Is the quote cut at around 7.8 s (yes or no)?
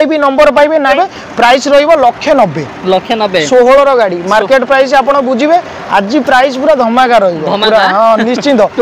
no